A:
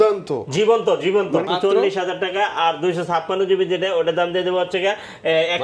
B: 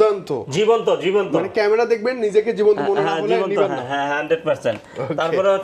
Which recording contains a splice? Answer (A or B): A